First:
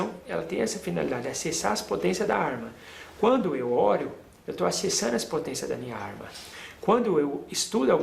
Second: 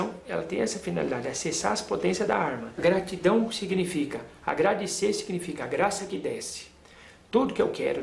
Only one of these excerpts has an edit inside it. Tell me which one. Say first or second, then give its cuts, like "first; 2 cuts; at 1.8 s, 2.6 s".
second; 1 cut; at 2.7 s